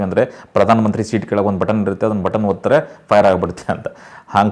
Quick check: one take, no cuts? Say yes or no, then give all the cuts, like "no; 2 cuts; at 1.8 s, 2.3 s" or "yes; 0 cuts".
yes; 0 cuts